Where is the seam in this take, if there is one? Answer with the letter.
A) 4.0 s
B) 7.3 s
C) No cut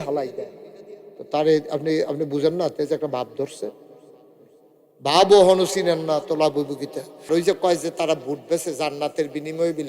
B